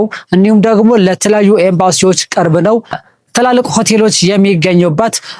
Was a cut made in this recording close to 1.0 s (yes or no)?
no